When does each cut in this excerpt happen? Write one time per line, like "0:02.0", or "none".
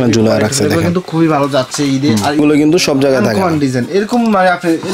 0:02.4